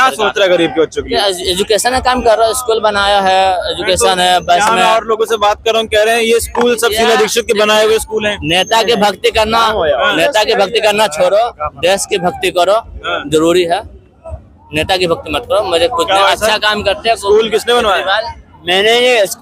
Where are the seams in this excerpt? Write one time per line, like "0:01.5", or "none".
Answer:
none